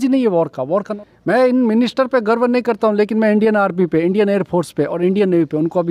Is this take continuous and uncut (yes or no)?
no